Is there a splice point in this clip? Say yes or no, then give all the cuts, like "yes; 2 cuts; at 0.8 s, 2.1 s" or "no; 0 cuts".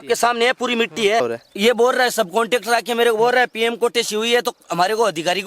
yes; 1 cut; at 1.2 s